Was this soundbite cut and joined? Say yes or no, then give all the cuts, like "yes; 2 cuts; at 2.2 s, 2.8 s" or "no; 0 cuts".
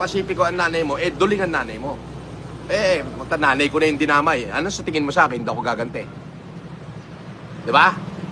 no; 0 cuts